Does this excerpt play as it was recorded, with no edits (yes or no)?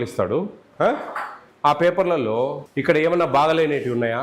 no